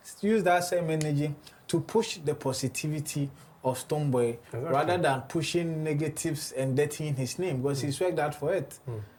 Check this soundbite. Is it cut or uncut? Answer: uncut